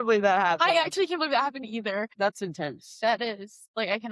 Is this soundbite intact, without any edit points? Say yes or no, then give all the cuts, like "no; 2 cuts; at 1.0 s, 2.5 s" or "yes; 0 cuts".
no; 1 cut; at 2.1 s